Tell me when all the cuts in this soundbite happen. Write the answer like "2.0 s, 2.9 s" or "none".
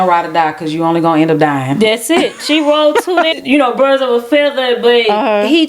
3.3 s